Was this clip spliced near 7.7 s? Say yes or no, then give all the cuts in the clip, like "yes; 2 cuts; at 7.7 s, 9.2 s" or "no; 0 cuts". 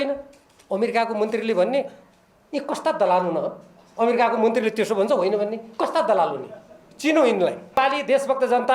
yes; 1 cut; at 7.7 s